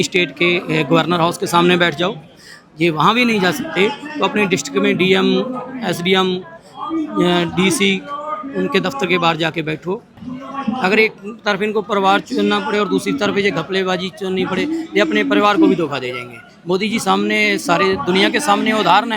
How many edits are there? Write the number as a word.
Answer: one